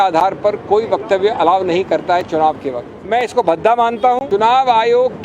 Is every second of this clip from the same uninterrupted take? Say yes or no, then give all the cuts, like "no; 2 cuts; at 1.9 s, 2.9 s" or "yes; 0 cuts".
no; 2 cuts; at 2.9 s, 4.2 s